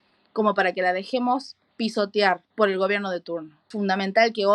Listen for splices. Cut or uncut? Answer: cut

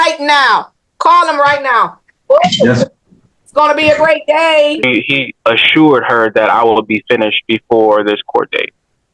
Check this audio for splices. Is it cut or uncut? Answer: cut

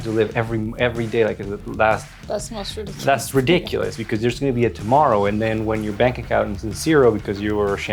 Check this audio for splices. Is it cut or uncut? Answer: uncut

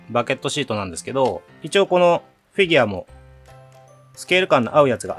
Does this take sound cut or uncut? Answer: cut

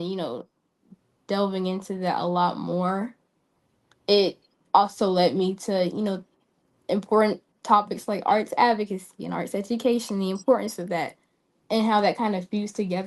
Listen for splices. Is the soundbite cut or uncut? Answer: uncut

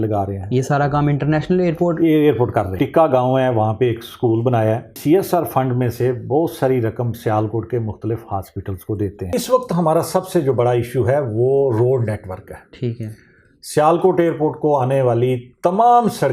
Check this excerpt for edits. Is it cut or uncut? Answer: cut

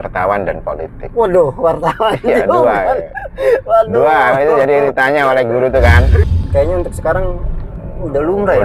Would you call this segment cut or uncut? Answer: cut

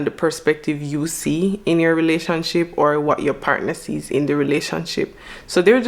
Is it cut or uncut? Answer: uncut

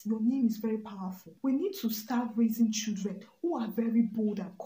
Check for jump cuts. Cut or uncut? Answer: cut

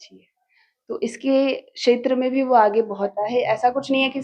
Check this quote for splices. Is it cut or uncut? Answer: cut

